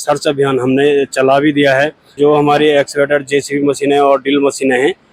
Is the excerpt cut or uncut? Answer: cut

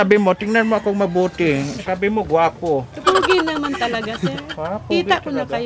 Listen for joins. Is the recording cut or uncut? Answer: uncut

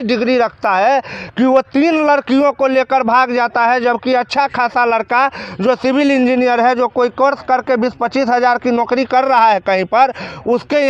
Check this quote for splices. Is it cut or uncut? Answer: uncut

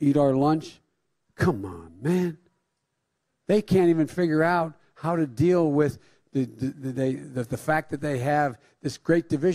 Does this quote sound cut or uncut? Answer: uncut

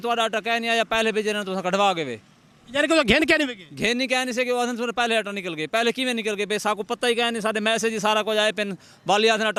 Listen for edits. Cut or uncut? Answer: uncut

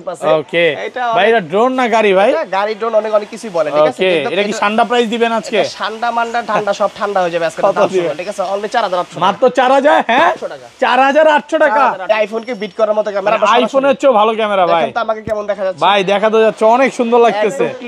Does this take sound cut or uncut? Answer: cut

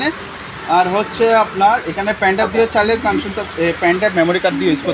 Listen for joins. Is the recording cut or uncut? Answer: uncut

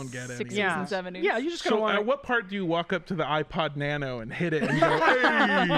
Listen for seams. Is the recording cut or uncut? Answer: uncut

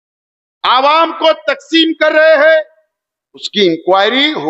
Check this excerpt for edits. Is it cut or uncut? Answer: cut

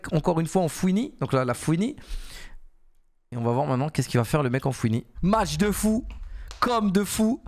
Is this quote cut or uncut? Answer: cut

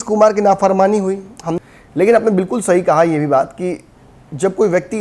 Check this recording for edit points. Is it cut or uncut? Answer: cut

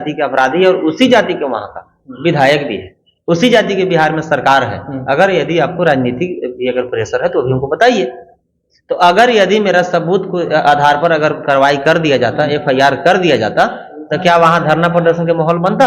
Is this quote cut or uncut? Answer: uncut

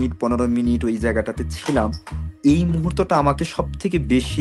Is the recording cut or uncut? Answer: uncut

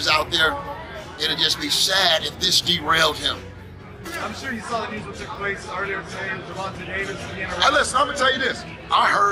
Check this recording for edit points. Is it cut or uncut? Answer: cut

